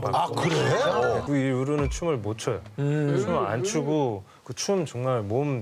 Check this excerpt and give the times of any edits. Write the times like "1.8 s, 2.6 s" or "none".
1.2 s